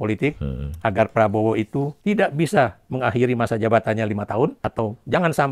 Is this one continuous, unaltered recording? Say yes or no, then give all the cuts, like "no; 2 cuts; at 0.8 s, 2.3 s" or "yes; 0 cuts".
no; 2 cuts; at 1.9 s, 4.6 s